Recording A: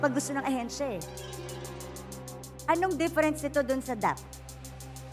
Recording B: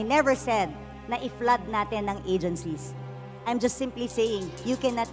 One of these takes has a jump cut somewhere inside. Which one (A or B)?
A